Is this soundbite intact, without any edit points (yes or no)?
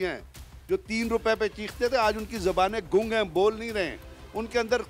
yes